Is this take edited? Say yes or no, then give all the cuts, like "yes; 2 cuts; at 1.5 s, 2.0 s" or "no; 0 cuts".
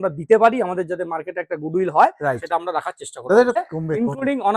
yes; 1 cut; at 3.6 s